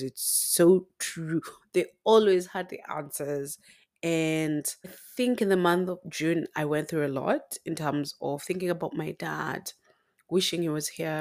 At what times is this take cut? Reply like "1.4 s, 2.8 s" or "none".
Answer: 5.0 s